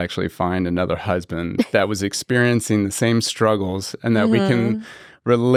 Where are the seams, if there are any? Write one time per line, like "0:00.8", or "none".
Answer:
none